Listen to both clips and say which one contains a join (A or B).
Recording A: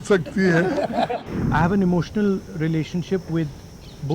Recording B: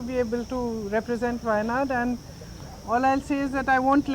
A